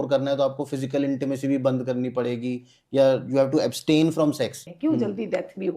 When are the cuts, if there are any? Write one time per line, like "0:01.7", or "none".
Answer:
0:04.6